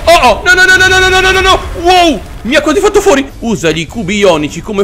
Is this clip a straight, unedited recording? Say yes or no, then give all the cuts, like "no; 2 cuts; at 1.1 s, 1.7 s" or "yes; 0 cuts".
no; 1 cut; at 3.3 s